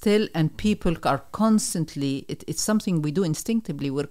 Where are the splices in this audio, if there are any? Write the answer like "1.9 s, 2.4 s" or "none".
none